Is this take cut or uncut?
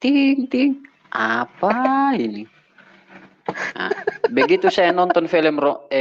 uncut